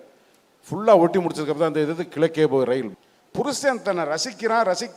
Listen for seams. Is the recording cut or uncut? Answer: cut